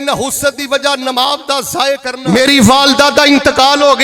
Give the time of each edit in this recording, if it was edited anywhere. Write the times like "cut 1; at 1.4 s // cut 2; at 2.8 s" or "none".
cut 1; at 2.1 s